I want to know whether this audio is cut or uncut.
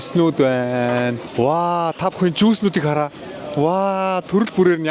uncut